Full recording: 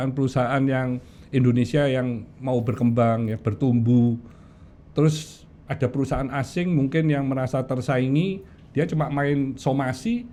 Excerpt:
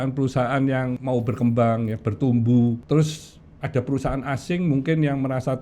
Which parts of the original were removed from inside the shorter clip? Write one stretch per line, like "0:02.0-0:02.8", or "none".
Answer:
0:01.0-0:02.4
0:04.2-0:04.9